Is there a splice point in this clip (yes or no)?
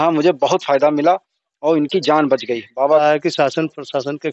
yes